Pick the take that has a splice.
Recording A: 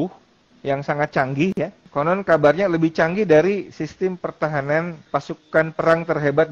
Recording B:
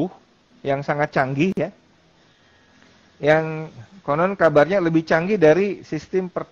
A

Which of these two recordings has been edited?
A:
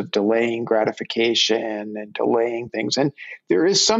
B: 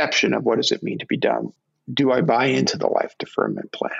B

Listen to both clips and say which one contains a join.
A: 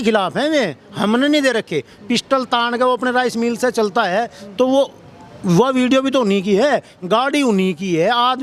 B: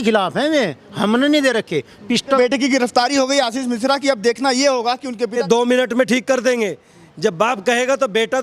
B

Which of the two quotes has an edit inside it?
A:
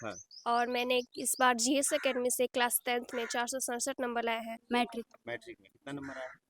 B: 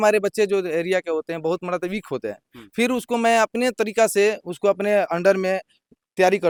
A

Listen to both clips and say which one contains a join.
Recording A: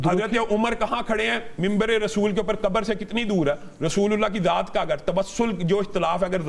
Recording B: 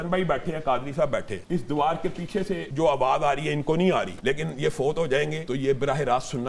B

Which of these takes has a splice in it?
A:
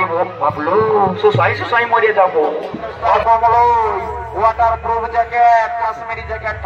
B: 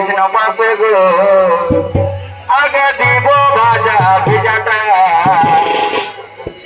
A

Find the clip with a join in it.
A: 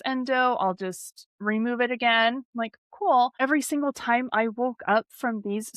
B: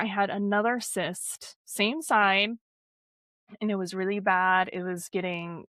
A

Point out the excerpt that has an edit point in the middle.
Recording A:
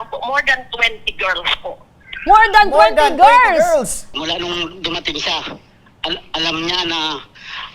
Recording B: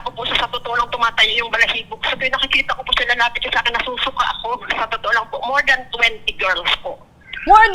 A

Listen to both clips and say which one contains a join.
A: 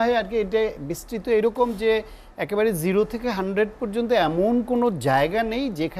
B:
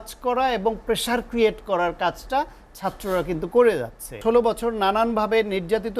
B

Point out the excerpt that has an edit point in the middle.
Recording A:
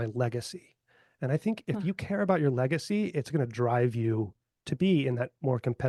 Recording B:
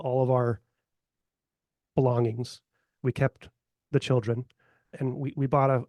B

